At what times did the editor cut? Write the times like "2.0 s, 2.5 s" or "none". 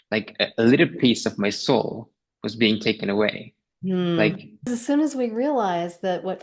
4.7 s